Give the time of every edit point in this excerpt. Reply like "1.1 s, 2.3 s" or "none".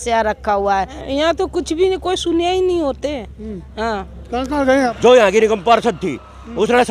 1.0 s, 4.9 s